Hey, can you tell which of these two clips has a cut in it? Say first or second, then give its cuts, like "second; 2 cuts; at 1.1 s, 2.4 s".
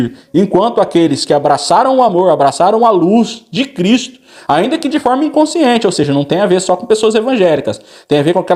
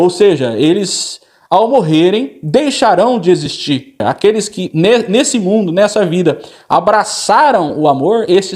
second; 1 cut; at 4.0 s